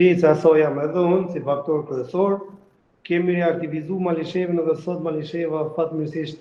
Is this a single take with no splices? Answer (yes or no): yes